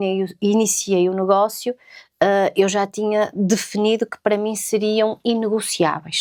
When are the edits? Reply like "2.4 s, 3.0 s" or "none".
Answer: none